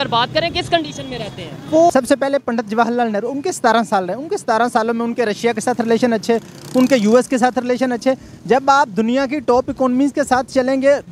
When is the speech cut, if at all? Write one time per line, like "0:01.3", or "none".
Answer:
0:01.9